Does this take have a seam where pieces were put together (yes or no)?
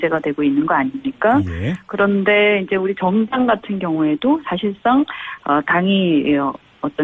no